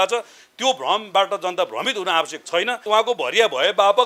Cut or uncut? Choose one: cut